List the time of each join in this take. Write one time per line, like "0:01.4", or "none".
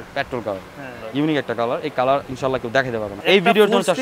0:01.0
0:03.1